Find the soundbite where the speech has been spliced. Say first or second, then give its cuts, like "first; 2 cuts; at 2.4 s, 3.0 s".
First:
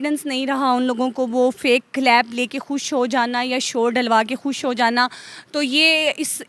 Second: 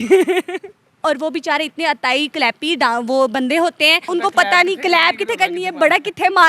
second; 2 cuts; at 1.0 s, 4.1 s